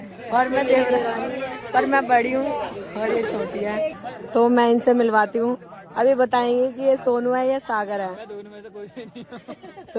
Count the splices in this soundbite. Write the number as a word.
one